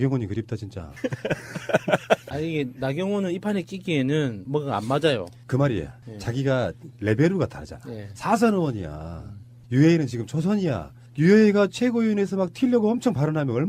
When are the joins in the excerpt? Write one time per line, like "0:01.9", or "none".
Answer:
0:02.3